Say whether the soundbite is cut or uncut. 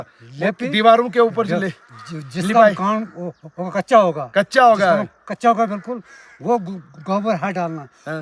uncut